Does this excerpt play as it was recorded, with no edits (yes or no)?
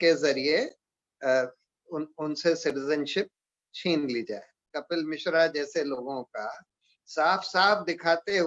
no